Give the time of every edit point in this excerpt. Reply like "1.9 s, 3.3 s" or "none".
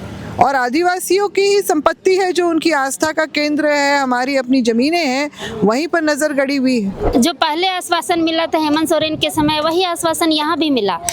7.0 s